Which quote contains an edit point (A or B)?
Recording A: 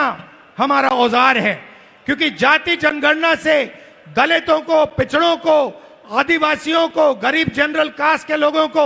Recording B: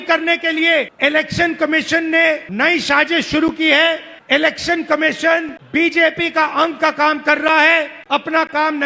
B